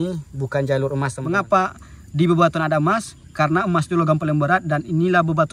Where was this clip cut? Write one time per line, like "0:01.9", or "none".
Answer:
0:01.2

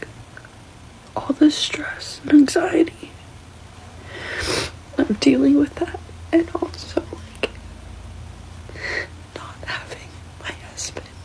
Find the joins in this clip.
none

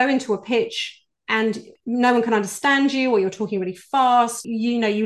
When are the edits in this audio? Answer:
0:01.4

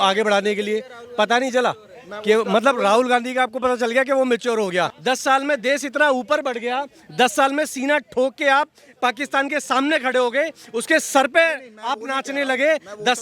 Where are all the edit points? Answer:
0:04.9

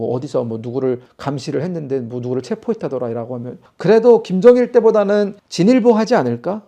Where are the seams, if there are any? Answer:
0:03.7

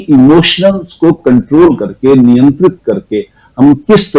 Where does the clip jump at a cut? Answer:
none

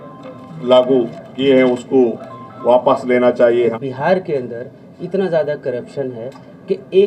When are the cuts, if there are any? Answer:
0:03.7

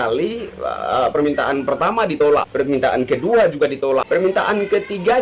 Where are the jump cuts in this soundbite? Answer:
0:02.2
0:03.7

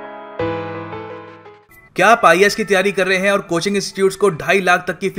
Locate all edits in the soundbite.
0:01.6

